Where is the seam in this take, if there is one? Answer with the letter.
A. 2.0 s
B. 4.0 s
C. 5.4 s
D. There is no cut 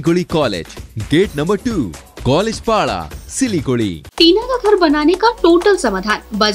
B